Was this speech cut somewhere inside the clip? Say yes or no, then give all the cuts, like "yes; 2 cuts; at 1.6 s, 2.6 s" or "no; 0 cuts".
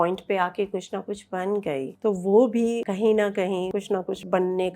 yes; 3 cuts; at 1.9 s, 2.8 s, 3.7 s